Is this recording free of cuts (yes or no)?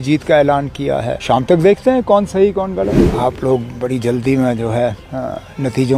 no